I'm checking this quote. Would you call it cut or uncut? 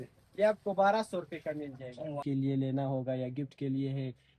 cut